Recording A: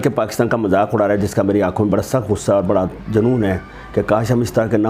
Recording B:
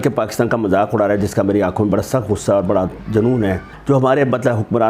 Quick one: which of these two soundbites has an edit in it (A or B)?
B